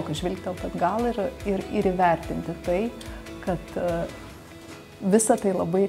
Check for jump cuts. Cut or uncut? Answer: uncut